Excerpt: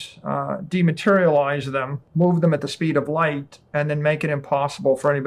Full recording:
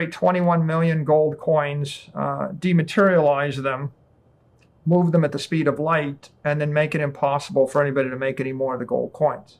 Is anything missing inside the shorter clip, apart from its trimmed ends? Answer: yes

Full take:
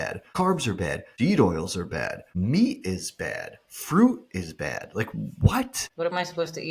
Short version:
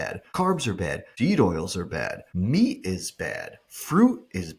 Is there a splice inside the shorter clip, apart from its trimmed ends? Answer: no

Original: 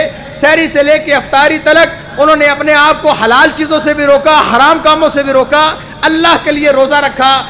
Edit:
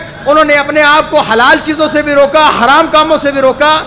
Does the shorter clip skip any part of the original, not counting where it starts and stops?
no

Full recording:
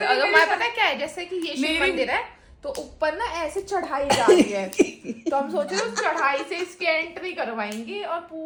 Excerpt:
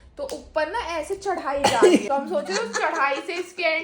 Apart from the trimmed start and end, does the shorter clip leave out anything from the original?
yes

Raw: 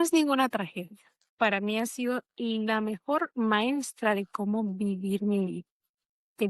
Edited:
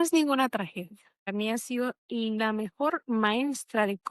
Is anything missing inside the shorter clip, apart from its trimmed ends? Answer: yes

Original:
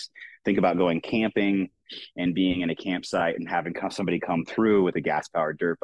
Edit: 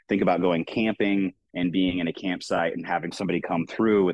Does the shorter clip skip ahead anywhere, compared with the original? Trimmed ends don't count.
yes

